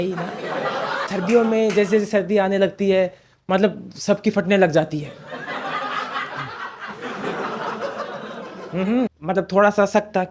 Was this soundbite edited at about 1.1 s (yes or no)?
yes